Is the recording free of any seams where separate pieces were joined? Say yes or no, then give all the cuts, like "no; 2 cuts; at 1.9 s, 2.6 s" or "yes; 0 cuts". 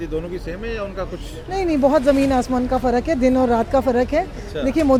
yes; 0 cuts